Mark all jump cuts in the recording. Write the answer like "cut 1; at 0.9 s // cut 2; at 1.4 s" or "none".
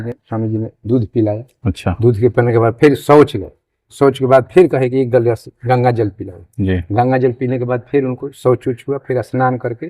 none